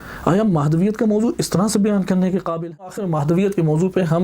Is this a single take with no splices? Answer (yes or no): no